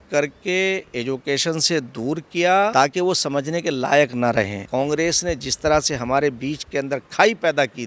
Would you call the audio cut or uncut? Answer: cut